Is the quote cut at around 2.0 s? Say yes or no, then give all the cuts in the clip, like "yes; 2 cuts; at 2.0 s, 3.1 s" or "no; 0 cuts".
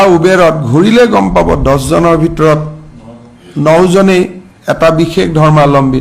no; 0 cuts